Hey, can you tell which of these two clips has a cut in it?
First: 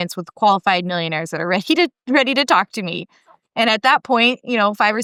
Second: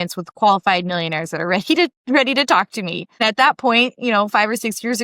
second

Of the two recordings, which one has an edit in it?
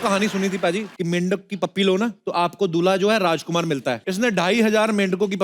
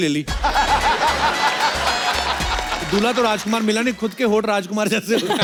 first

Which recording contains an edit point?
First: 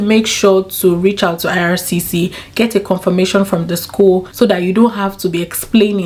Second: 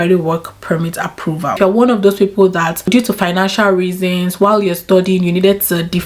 second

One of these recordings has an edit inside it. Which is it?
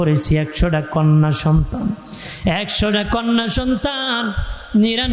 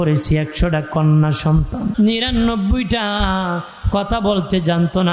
second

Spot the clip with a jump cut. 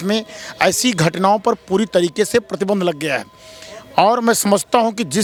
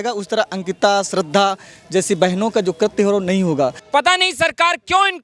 second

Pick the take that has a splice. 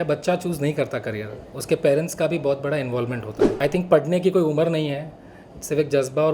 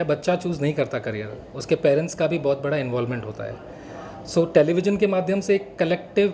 first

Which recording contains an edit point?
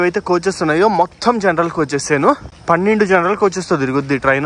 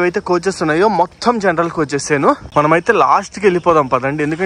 second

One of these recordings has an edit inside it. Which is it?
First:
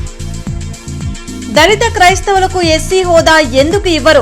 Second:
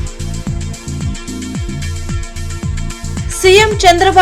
second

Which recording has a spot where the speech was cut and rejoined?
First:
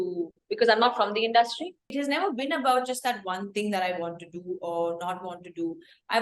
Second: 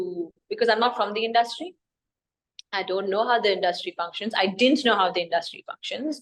first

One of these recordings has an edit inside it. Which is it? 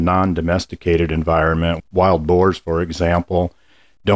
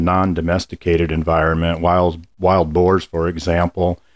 first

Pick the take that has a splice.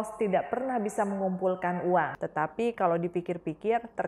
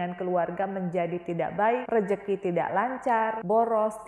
first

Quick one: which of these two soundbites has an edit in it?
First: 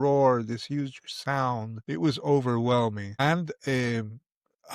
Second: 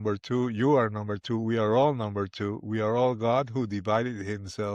first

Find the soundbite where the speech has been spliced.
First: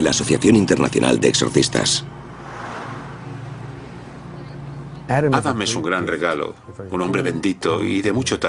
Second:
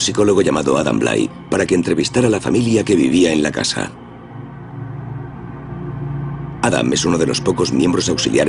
first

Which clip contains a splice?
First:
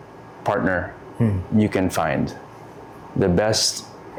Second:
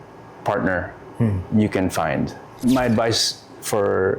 second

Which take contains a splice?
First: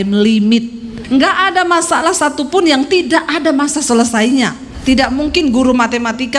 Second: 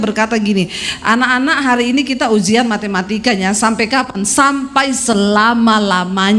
first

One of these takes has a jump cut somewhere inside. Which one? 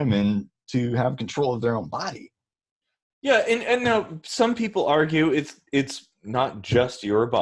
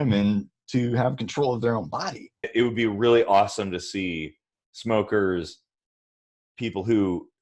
second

